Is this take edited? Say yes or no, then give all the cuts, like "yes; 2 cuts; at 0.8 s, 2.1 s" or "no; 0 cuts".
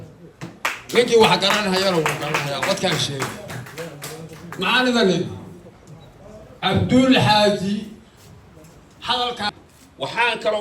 yes; 1 cut; at 9.5 s